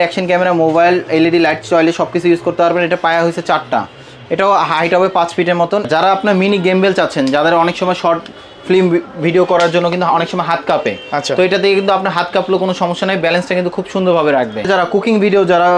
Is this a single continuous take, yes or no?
no